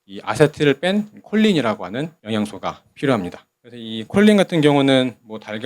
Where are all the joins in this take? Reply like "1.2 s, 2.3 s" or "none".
2.2 s